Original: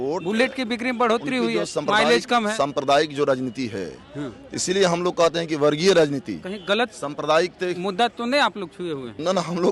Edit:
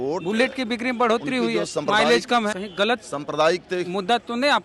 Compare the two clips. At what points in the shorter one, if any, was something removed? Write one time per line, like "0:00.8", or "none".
0:02.5